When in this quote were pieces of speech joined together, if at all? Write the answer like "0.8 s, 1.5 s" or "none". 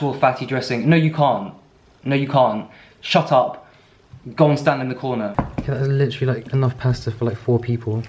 5.3 s